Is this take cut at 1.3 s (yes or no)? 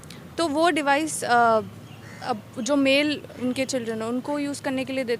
no